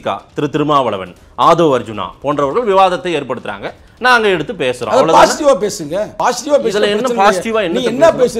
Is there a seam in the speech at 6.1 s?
yes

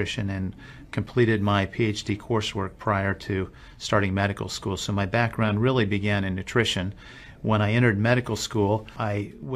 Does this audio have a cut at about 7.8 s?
no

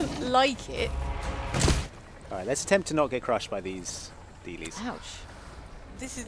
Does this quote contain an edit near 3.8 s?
no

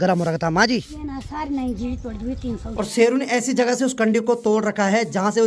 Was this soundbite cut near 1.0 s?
yes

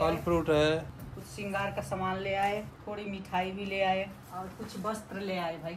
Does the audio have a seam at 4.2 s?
yes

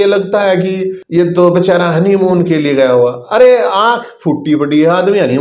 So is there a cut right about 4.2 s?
no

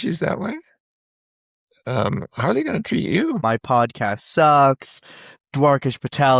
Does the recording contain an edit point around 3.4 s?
yes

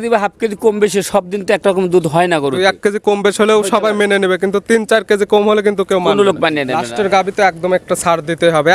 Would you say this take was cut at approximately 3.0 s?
no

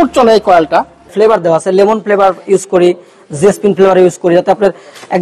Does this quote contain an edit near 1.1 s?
yes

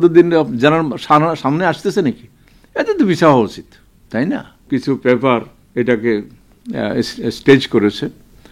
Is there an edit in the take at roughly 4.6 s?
yes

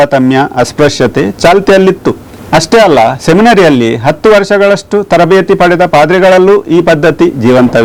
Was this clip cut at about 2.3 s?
no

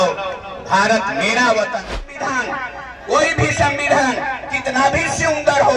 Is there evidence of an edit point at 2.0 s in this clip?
yes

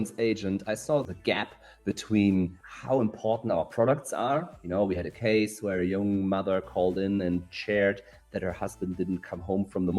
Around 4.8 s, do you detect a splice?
no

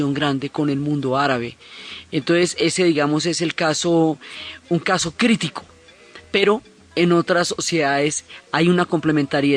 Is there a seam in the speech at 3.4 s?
yes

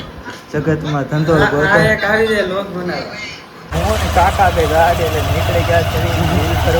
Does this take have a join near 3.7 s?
yes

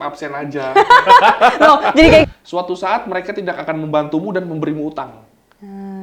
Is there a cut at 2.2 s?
yes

